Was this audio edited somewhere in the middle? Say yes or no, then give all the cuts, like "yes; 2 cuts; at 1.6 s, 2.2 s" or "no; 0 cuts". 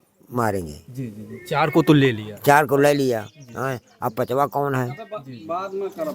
no; 0 cuts